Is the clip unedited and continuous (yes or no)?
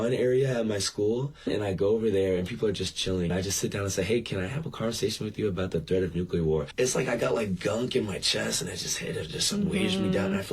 no